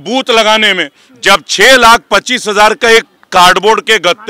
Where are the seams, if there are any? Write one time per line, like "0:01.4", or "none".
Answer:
none